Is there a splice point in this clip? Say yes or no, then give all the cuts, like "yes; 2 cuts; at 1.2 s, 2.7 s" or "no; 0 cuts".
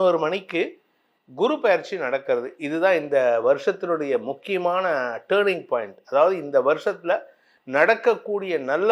no; 0 cuts